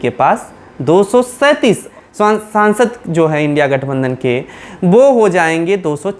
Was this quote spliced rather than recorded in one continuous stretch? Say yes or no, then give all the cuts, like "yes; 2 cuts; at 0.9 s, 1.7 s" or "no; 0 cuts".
yes; 1 cut; at 1.9 s